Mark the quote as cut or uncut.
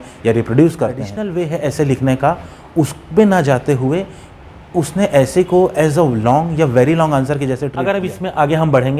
cut